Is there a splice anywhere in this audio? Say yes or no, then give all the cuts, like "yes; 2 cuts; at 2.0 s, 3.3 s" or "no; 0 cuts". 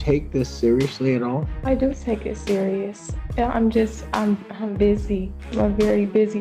yes; 2 cuts; at 1.5 s, 5.4 s